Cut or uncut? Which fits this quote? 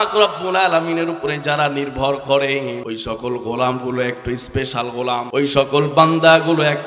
cut